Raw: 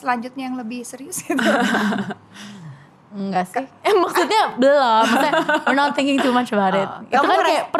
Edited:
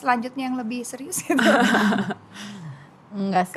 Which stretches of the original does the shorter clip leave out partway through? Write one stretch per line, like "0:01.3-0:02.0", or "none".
none